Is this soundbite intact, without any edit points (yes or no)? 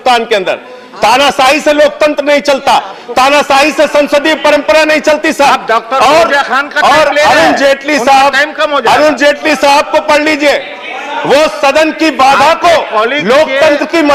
yes